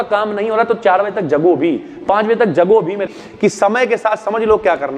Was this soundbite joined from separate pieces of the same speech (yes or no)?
yes